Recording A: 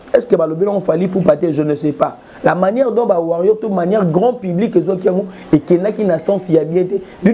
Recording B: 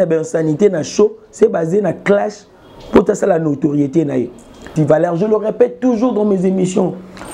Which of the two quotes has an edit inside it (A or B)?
B